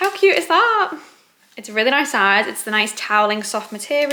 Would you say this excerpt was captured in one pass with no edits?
yes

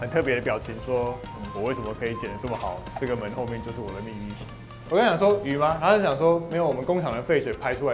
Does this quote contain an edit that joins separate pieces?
yes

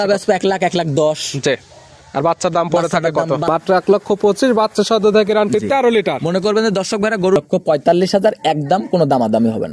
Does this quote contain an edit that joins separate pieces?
yes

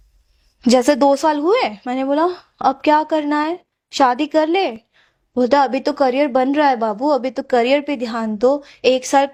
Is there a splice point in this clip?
no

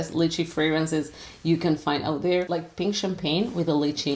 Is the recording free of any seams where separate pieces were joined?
no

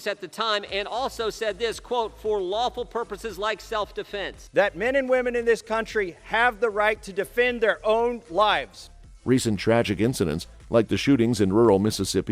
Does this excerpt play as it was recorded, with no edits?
yes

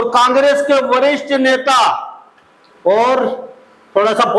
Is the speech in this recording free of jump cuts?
yes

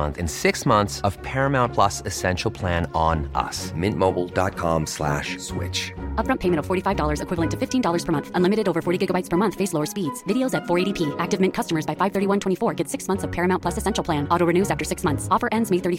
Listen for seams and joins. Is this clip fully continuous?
yes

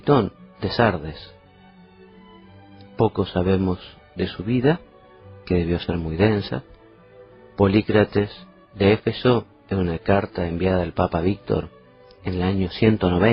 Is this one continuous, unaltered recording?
no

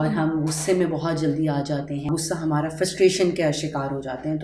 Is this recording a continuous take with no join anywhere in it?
no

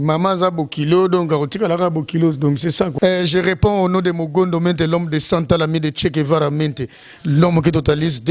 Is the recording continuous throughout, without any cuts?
no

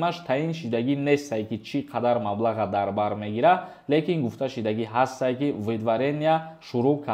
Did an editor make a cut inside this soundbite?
no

